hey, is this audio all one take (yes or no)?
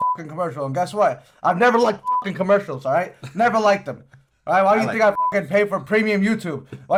yes